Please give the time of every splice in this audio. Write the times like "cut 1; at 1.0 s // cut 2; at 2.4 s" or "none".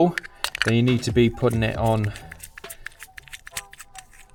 none